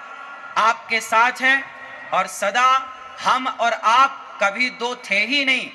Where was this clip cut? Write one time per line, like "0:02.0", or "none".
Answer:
none